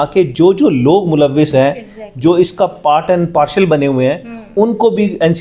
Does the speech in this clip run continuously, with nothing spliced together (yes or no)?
yes